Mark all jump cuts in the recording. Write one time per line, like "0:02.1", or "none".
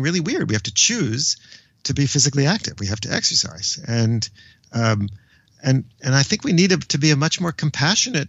none